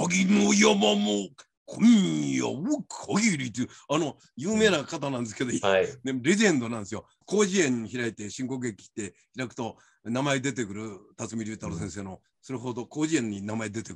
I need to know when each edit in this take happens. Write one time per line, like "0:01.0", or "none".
none